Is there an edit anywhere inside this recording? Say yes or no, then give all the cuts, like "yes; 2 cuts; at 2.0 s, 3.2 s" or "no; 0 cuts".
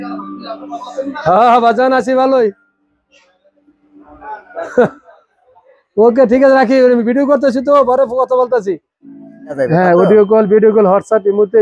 yes; 1 cut; at 9.7 s